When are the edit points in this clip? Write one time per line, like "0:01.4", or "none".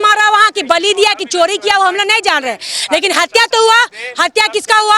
none